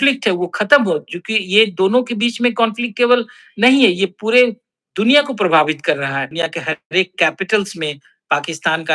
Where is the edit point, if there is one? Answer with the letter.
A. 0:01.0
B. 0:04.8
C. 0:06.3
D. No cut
C